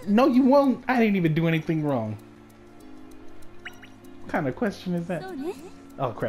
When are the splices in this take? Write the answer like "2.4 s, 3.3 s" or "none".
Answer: none